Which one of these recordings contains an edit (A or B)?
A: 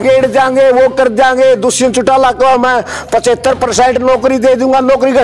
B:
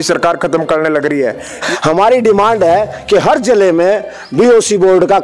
B